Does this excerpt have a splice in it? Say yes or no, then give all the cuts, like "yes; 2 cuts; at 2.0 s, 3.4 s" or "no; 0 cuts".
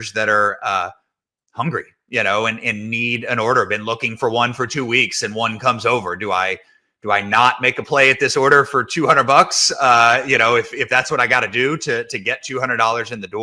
no; 0 cuts